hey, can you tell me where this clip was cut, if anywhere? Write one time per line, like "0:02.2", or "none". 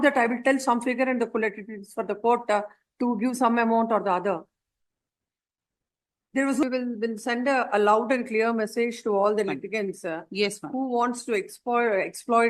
0:06.6